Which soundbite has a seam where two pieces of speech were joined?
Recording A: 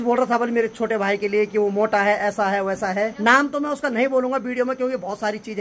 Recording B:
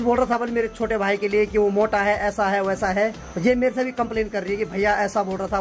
A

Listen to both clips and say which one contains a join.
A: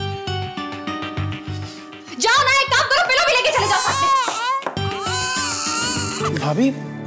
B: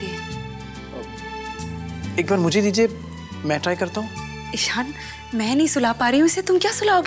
A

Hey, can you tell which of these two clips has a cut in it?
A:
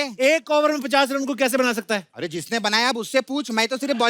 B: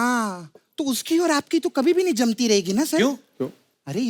A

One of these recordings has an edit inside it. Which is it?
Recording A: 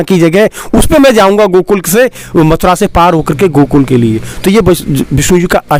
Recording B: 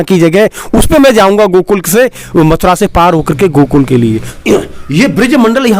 B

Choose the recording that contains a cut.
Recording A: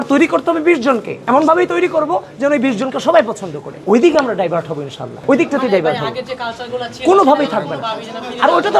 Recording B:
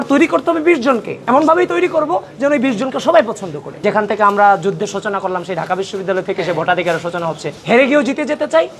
B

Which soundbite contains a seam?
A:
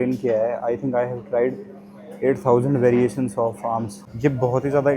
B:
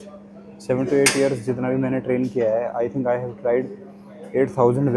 A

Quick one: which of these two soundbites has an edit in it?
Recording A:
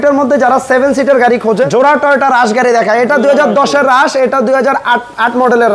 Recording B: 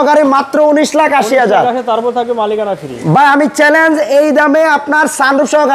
A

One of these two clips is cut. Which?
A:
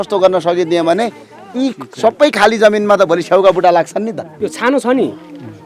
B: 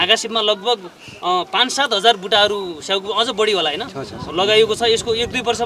A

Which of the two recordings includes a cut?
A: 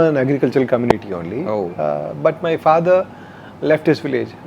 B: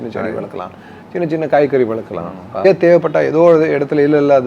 B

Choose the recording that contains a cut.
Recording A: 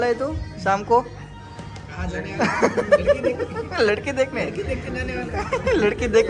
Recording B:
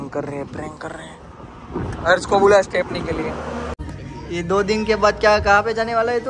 B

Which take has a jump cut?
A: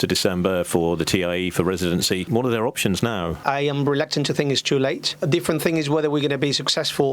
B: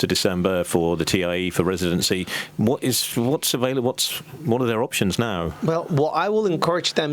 A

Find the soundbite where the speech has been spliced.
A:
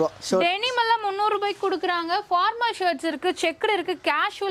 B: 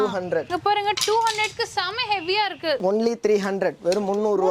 B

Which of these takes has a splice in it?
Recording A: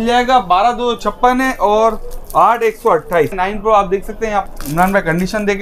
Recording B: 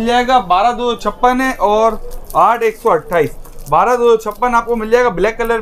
A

